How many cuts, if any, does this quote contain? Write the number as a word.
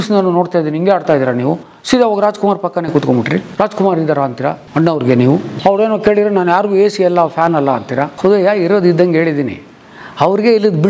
zero